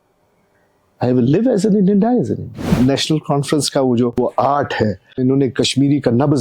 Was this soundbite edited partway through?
yes; 3 cuts; at 2.8 s, 4.2 s, 5.2 s

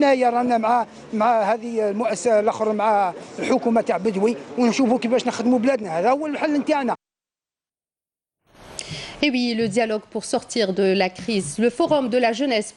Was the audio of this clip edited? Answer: no; 0 cuts

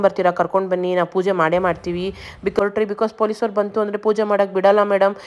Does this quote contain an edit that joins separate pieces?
yes; 1 cut; at 2.6 s

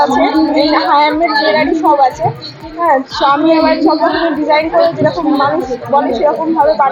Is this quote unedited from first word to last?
yes; 0 cuts

